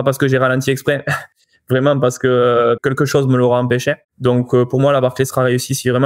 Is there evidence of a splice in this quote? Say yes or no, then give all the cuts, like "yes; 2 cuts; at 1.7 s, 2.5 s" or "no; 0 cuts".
yes; 2 cuts; at 2.8 s, 4.1 s